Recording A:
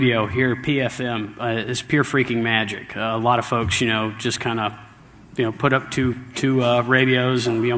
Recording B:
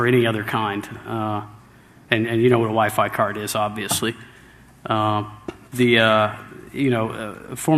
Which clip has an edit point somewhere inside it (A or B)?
B